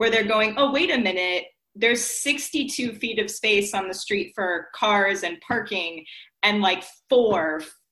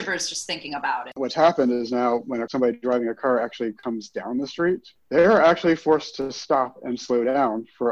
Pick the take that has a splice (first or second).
second